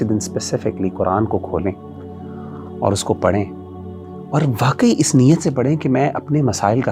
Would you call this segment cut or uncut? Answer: uncut